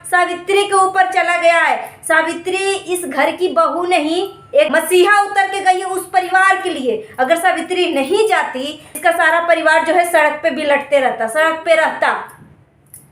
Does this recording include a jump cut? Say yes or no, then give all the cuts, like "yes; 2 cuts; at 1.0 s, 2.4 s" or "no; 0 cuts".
yes; 2 cuts; at 4.7 s, 8.9 s